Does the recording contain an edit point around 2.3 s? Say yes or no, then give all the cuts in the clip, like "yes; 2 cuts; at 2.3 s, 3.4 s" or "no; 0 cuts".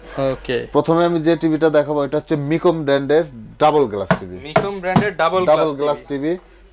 no; 0 cuts